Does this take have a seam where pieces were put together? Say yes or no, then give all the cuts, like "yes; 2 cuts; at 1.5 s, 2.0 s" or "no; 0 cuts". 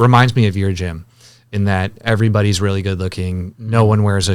no; 0 cuts